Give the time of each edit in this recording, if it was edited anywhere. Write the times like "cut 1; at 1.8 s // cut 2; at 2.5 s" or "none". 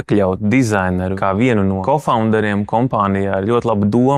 cut 1; at 1.2 s // cut 2; at 1.8 s